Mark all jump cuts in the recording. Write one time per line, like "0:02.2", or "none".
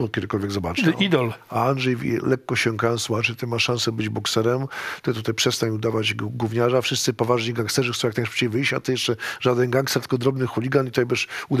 none